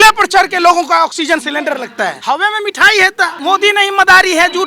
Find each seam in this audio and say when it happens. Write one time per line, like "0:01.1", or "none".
0:02.2
0:03.4